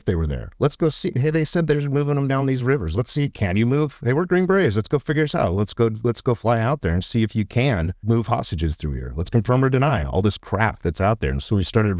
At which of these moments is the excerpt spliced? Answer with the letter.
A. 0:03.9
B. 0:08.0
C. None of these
B